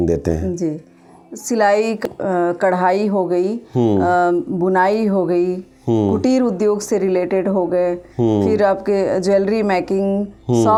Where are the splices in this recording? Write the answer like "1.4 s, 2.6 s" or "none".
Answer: none